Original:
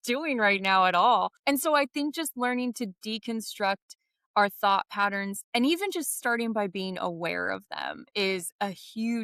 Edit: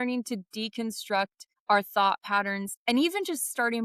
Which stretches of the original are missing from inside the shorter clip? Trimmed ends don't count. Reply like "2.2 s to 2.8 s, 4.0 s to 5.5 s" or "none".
4.0 s to 4.1 s